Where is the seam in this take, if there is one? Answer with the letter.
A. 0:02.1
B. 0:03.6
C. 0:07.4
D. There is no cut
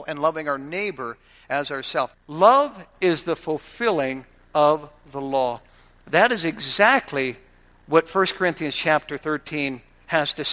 A